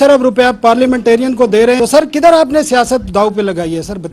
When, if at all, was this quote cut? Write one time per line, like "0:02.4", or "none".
0:01.8